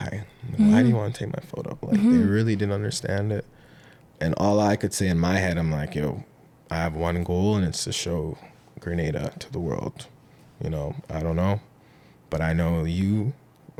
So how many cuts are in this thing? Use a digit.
0